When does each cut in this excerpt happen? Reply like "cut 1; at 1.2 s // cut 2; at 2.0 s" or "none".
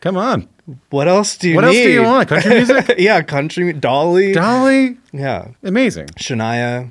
none